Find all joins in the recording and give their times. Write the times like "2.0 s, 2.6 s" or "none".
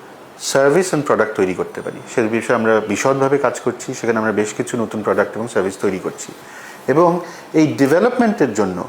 none